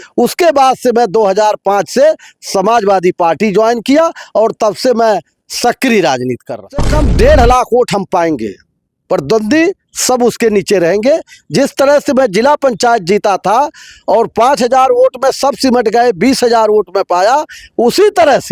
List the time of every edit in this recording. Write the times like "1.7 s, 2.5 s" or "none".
6.9 s